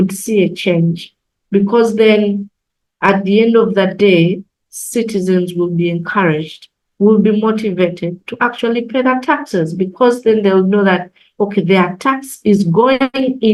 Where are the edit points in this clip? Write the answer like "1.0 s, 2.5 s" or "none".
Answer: none